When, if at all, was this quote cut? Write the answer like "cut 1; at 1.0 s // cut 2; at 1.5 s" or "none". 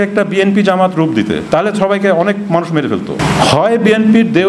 cut 1; at 3.2 s